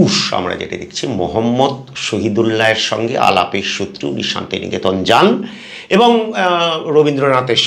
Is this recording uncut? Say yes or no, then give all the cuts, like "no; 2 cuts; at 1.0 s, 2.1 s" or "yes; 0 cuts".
yes; 0 cuts